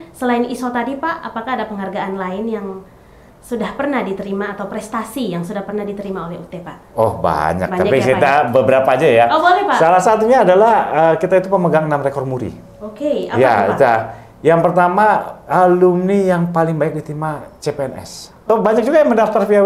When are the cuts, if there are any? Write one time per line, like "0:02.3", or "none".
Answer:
0:18.4